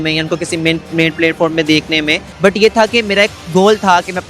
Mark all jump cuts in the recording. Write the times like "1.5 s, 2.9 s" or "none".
2.2 s